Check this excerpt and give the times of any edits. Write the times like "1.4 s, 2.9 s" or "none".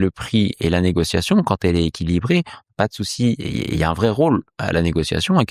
none